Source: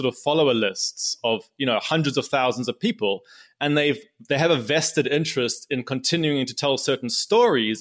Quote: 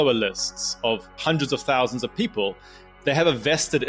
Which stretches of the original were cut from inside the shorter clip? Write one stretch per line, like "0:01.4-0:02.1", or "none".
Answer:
0:01.6-0:01.8
0:03.5-0:04.1